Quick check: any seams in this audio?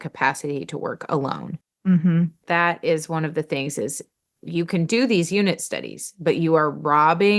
yes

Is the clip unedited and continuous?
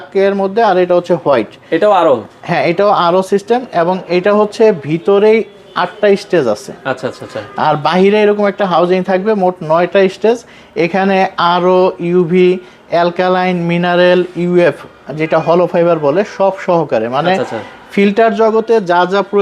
yes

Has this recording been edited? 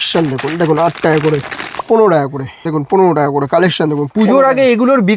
yes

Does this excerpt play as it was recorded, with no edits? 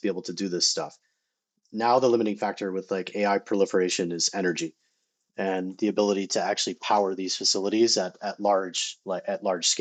yes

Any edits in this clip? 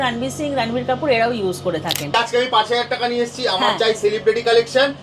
yes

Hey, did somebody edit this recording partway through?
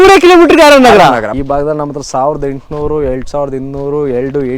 yes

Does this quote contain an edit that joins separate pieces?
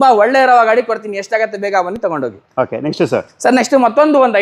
no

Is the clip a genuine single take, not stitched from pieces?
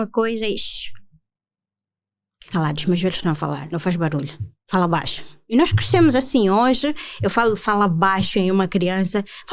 yes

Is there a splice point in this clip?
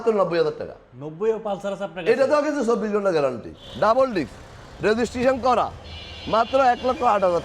yes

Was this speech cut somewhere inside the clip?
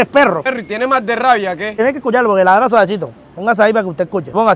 yes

